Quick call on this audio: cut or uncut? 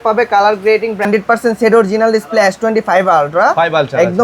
cut